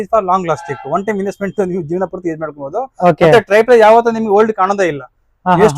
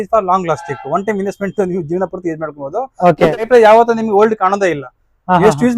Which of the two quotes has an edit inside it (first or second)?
second